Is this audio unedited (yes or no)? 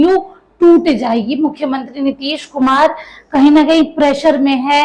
yes